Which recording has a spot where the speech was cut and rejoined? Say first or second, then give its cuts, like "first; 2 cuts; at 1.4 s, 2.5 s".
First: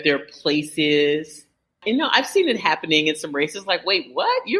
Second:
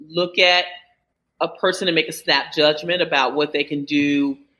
first; 1 cut; at 1.7 s